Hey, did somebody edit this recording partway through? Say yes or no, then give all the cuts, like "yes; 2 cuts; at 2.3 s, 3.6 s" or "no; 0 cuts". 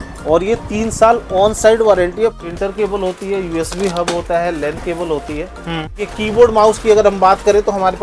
yes; 2 cuts; at 2.4 s, 6.1 s